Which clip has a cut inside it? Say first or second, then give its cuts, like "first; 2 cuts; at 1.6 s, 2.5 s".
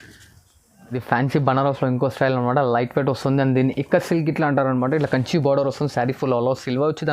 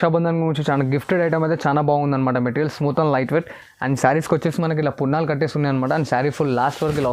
first; 1 cut; at 1.0 s